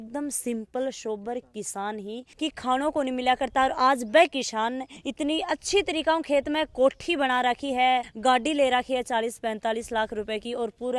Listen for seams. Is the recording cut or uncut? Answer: cut